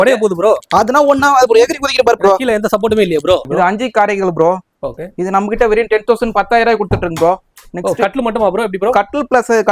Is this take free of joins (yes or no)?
no